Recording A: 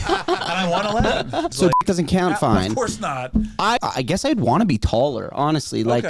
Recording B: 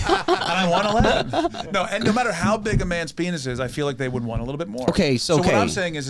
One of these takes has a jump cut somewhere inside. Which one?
A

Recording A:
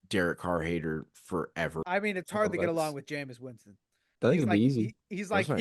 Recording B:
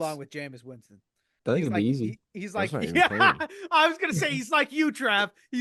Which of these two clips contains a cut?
A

